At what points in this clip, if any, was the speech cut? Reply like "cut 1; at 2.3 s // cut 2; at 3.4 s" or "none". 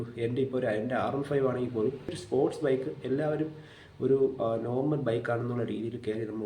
cut 1; at 2.1 s